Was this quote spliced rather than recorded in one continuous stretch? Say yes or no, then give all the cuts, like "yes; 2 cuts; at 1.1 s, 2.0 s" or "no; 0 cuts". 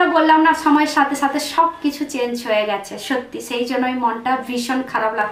no; 0 cuts